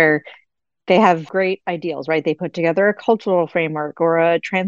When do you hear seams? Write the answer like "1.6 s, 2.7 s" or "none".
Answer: 1.3 s